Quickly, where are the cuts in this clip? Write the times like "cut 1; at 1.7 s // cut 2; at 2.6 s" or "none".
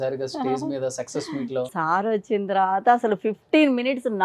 cut 1; at 1.7 s